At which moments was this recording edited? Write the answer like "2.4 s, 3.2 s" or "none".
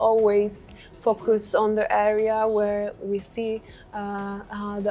none